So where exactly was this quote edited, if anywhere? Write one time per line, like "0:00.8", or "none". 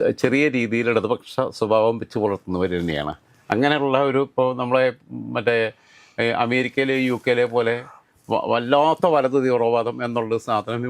none